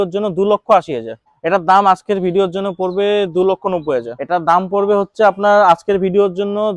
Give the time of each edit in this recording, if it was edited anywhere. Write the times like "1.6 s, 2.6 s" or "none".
1.3 s, 4.2 s